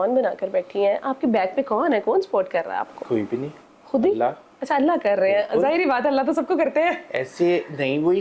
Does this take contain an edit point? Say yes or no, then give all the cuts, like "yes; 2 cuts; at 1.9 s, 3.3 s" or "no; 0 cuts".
no; 0 cuts